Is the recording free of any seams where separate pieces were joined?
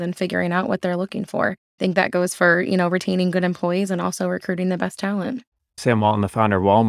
no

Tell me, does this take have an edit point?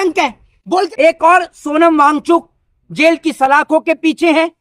yes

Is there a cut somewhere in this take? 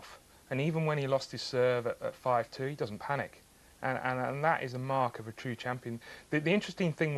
yes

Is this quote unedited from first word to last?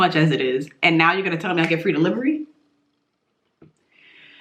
yes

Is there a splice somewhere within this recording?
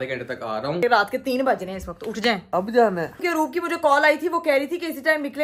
yes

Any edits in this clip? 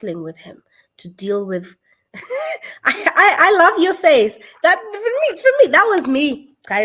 no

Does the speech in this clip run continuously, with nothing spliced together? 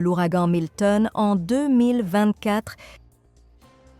no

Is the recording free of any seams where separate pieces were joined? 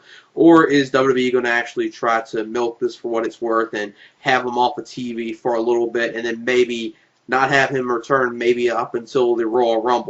no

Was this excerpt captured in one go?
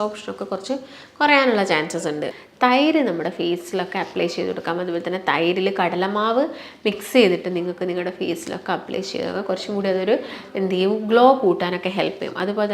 no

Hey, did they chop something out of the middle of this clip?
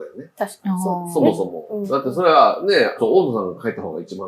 yes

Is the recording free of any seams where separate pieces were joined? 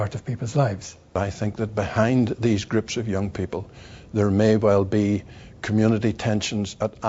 no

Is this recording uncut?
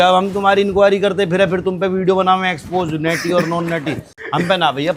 yes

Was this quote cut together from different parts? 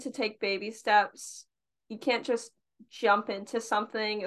no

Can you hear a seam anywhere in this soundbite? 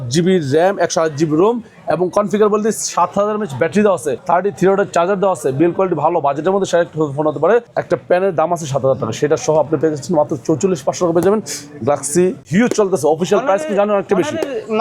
yes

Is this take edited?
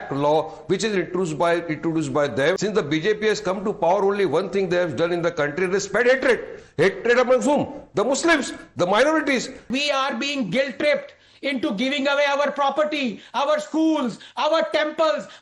yes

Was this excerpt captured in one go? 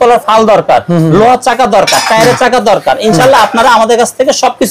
yes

